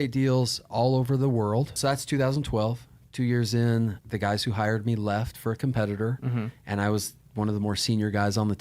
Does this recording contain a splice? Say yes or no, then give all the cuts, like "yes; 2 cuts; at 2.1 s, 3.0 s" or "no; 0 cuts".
yes; 2 cuts; at 1.8 s, 4.0 s